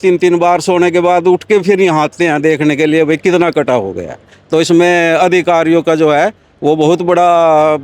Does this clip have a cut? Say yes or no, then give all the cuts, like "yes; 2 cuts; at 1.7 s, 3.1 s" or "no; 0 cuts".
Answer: yes; 1 cut; at 4.3 s